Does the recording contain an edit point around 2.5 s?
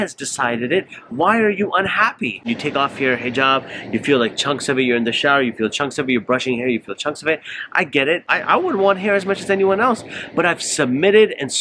yes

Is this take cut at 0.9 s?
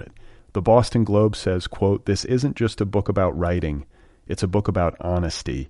no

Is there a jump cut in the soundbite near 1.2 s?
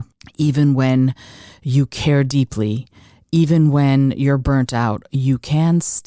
no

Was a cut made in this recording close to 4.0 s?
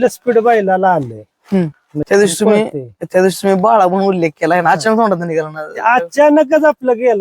no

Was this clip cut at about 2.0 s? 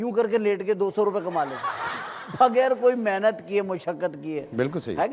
no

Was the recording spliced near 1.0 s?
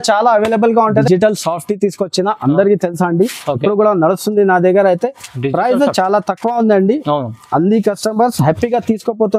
yes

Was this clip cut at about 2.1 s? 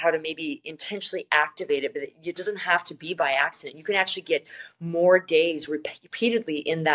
no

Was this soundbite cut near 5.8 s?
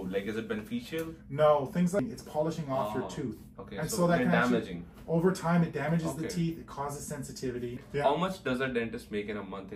no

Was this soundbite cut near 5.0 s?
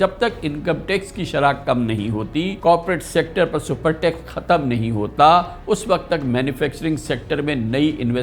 no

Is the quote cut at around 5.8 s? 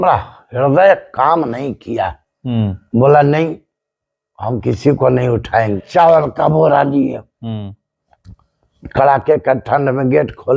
yes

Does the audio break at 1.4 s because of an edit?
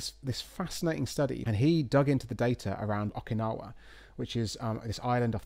yes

